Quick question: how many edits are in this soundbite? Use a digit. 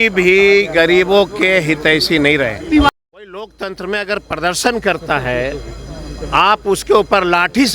1